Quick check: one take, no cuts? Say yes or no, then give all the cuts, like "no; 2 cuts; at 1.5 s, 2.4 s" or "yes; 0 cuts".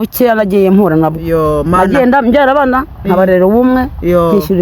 yes; 0 cuts